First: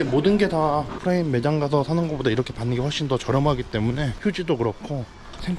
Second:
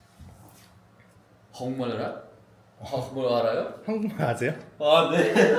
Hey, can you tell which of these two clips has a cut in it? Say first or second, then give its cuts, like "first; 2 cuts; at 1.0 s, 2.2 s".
first; 2 cuts; at 1.0 s, 4.1 s